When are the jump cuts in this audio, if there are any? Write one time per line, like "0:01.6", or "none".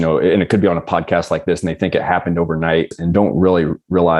0:02.9